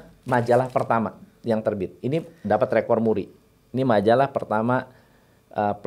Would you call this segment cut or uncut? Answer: uncut